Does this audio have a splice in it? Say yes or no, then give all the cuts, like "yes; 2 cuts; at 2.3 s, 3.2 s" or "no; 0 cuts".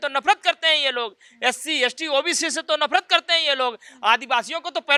no; 0 cuts